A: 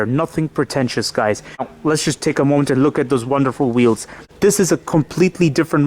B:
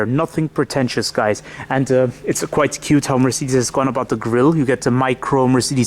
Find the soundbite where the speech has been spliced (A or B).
A